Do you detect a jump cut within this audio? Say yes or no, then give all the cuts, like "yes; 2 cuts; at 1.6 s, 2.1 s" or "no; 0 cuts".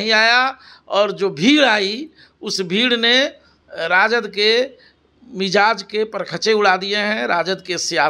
no; 0 cuts